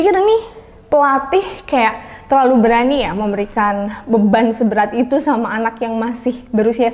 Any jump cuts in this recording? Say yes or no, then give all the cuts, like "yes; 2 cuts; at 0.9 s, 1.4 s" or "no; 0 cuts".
no; 0 cuts